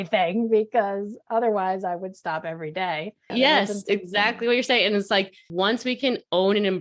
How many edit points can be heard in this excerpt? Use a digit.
2